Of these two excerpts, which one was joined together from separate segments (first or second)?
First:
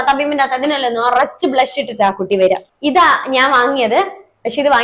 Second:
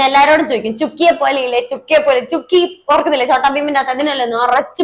first